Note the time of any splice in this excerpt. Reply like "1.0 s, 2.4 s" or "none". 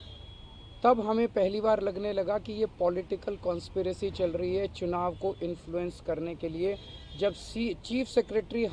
none